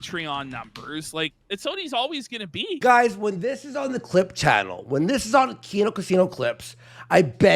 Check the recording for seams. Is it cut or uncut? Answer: cut